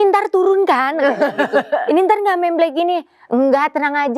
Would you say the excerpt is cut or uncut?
uncut